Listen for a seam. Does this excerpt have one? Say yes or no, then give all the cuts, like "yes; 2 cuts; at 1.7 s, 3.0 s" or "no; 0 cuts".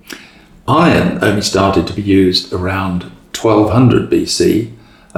no; 0 cuts